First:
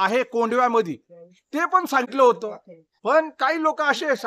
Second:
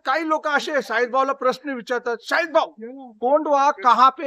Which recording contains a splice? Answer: first; 1 cut; at 2.1 s

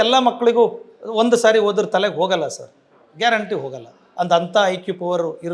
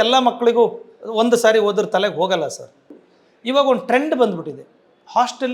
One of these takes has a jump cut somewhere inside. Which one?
second; 1 cut; at 3.0 s

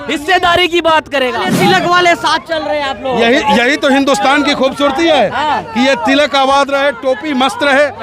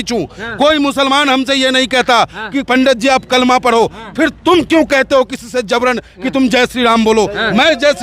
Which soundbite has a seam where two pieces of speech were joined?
first; 1 cut; at 1.5 s

